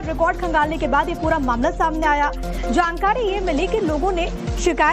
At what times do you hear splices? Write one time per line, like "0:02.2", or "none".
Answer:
0:03.4